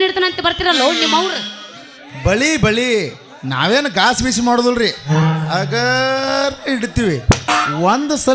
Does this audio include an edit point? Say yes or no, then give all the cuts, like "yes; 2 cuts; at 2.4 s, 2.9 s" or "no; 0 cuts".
no; 0 cuts